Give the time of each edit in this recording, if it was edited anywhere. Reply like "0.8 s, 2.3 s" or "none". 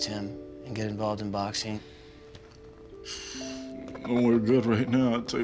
none